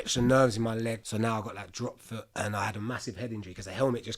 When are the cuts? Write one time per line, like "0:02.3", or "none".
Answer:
0:01.0
0:02.3